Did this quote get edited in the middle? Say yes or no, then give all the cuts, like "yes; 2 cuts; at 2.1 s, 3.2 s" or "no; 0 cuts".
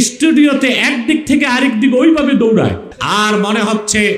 yes; 1 cut; at 2.9 s